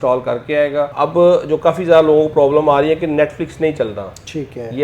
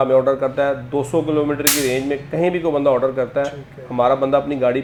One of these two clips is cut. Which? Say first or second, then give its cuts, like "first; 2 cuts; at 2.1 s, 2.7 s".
first; 1 cut; at 0.9 s